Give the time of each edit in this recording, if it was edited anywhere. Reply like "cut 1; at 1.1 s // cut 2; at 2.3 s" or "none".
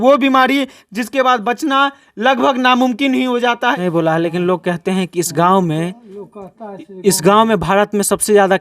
cut 1; at 3.8 s